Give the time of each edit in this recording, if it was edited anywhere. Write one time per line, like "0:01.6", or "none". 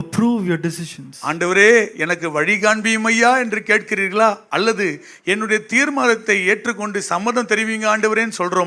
none